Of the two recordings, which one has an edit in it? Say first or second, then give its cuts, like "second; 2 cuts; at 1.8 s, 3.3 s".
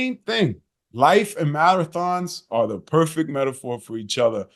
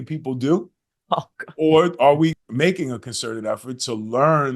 second; 1 cut; at 2.4 s